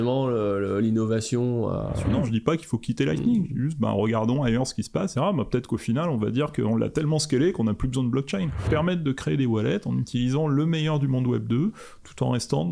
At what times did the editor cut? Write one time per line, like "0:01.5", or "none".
0:02.1
0:05.1
0:08.6